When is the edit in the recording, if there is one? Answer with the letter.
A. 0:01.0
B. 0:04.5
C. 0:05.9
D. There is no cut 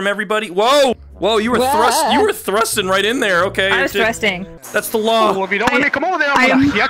B